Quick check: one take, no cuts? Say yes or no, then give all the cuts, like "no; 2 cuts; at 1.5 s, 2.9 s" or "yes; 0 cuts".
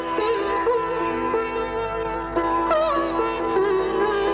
yes; 0 cuts